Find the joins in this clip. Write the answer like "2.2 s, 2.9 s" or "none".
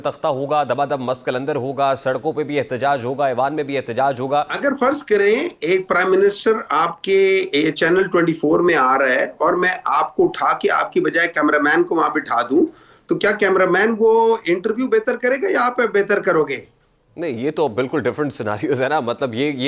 4.5 s